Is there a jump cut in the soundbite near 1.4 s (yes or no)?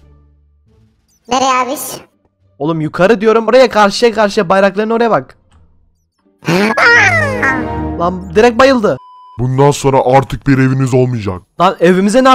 no